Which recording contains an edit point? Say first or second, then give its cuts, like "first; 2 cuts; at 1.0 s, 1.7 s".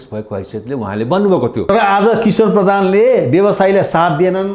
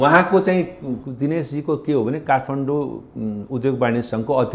first; 1 cut; at 1.7 s